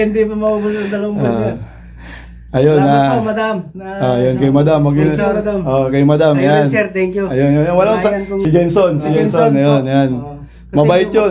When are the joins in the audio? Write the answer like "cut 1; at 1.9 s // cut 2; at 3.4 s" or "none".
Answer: cut 1; at 8.4 s